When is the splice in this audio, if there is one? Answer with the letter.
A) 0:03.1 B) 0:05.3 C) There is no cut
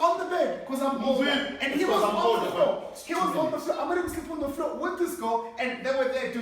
C